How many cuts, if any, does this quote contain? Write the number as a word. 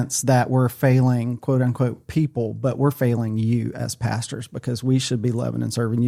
zero